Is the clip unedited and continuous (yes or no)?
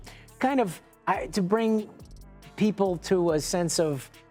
yes